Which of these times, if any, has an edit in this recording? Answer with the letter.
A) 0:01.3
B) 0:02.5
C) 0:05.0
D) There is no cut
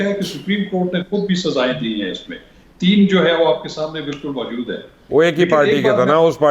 D